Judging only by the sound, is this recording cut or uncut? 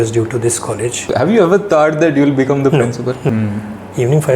cut